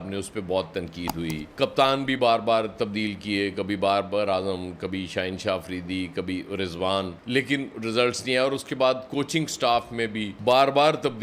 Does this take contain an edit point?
no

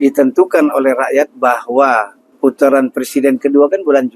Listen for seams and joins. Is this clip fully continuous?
no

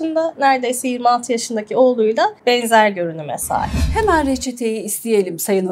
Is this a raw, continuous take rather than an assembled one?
no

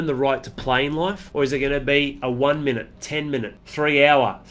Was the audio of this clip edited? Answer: yes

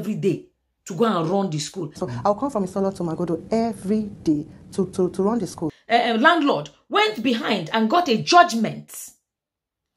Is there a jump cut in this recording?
yes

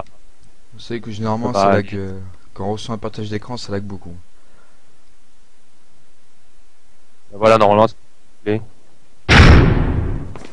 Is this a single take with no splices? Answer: yes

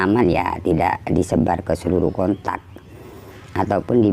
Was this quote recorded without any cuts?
yes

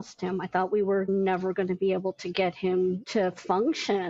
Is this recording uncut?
no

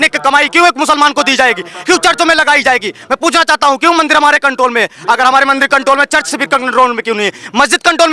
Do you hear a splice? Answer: no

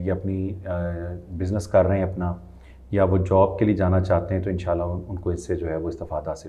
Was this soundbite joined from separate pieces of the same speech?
no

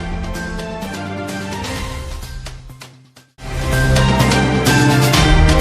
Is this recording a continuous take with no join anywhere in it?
yes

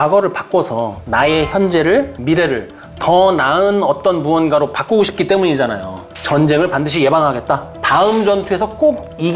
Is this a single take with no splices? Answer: no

